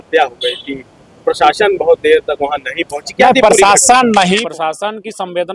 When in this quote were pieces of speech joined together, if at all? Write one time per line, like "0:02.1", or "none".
0:04.4